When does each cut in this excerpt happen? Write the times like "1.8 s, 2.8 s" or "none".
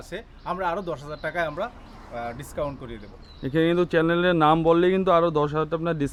none